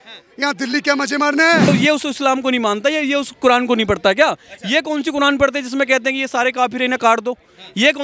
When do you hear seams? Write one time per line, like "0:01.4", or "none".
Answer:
0:01.7